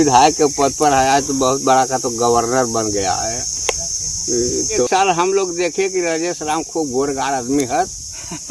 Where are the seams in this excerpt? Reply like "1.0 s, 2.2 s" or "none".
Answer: none